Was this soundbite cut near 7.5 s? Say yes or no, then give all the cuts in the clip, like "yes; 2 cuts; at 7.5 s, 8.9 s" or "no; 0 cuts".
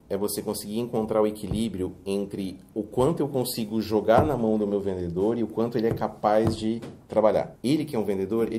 yes; 1 cut; at 7.5 s